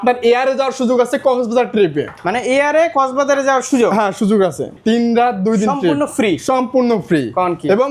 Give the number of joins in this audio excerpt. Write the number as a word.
one